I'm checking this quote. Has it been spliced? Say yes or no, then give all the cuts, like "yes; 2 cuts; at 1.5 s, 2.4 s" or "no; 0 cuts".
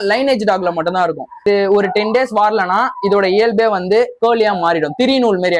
yes; 1 cut; at 1.4 s